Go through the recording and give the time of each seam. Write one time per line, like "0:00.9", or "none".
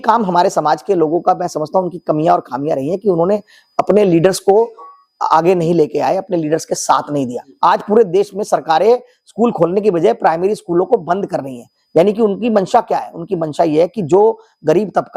0:07.4